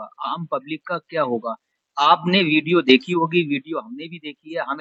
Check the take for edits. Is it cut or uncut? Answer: uncut